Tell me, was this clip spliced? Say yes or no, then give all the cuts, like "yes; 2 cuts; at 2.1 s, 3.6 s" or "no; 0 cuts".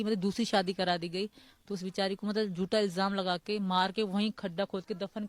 no; 0 cuts